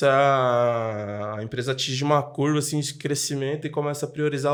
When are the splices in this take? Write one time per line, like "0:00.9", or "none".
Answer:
none

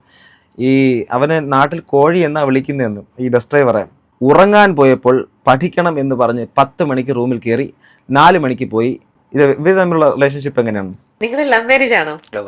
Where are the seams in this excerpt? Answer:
0:04.0
0:09.2

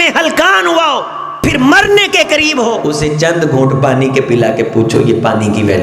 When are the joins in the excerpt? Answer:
0:01.2
0:02.8

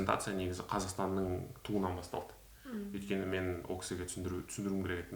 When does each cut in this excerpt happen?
none

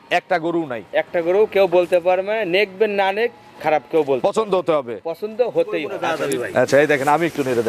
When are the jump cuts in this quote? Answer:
0:05.9

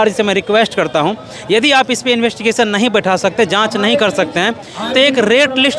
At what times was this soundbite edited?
none

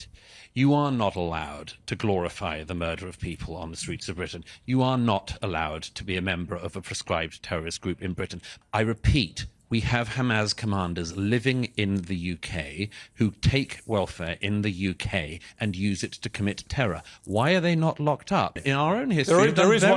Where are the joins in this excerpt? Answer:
0:08.4
0:18.6

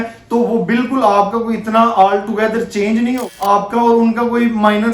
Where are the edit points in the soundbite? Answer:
0:03.2

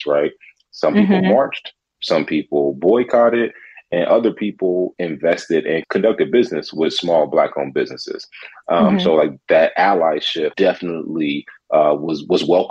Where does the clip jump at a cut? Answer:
0:05.8
0:10.5

